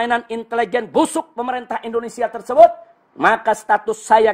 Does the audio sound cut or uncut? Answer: uncut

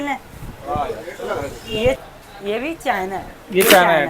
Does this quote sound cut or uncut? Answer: cut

